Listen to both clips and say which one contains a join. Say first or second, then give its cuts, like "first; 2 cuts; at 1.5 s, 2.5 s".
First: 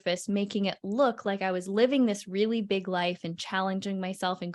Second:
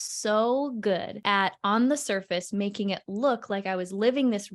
second; 1 cut; at 1.1 s